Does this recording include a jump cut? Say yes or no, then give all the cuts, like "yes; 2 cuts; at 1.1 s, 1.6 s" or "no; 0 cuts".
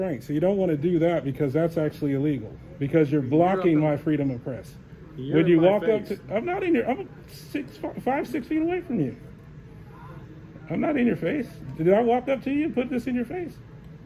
no; 0 cuts